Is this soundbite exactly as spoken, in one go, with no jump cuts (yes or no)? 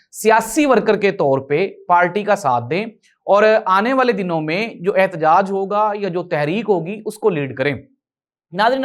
yes